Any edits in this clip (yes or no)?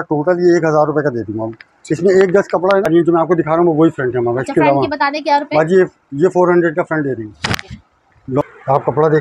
yes